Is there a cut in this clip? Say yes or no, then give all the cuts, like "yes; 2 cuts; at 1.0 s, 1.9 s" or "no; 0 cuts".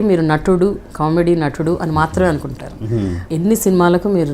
yes; 1 cut; at 3.2 s